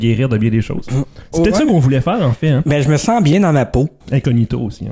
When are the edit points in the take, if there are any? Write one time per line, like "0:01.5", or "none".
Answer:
0:04.0